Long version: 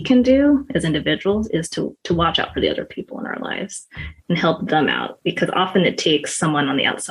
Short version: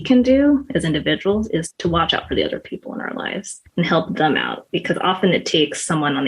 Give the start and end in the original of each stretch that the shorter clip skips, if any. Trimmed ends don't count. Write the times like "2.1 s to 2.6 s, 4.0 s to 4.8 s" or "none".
1.7 s to 2.0 s, 3.8 s to 4.1 s